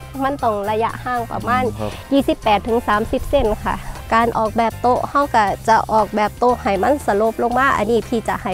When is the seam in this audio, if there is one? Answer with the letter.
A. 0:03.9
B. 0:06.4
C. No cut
A